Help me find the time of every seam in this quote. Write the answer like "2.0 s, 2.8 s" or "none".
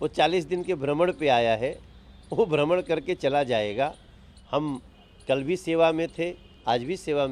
none

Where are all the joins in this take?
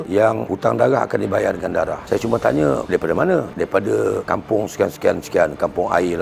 none

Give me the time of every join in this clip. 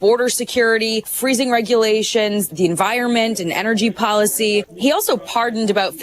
1.1 s, 2.5 s, 4.7 s

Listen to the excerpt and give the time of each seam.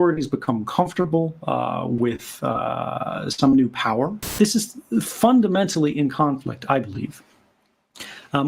4.3 s

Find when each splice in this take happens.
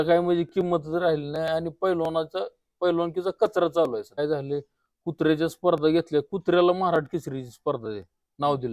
4.2 s

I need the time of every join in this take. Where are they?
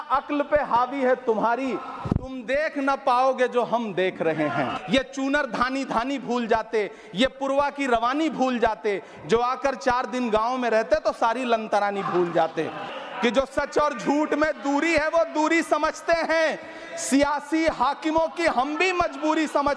4.8 s, 12.9 s

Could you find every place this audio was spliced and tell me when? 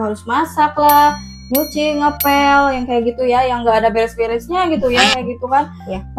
none

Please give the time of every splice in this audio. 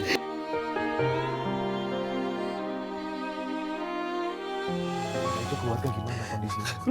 5.4 s

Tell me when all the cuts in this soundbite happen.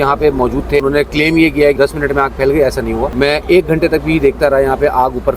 0.8 s, 1.8 s, 3.1 s

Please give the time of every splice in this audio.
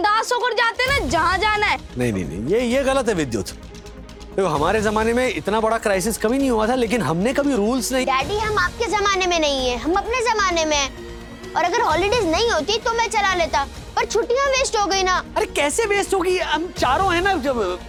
none

